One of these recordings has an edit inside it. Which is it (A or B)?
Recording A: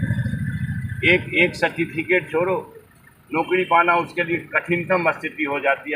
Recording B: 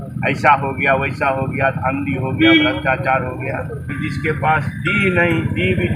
B